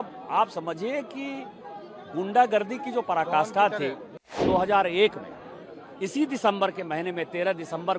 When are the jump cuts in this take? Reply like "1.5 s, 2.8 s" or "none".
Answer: 4.3 s